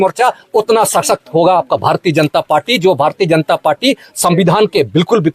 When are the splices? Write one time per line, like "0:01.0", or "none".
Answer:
none

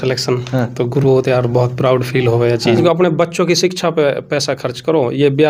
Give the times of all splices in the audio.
0:02.8

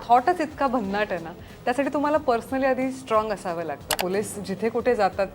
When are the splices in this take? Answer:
0:03.9

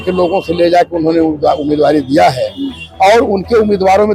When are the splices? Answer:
none

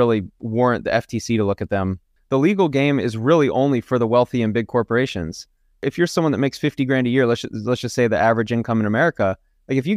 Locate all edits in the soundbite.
0:02.0
0:05.8

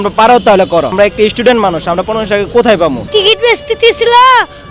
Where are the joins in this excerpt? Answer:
0:00.9
0:03.0

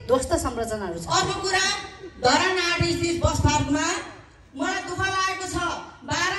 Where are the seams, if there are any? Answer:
0:01.0

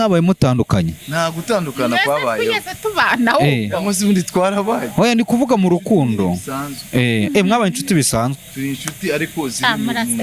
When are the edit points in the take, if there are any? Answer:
none

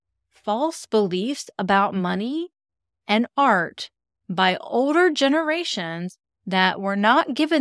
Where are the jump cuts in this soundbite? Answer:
none

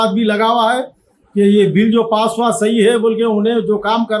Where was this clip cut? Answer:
none

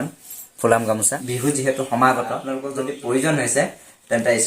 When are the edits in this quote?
0:01.2
0:02.4

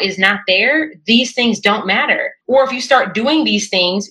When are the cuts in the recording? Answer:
0:02.3

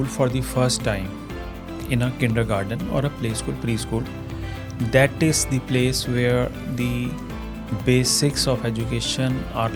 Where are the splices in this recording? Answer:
none

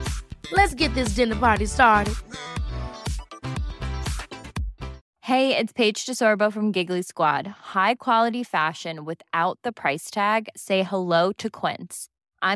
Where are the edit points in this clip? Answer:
0:05.1

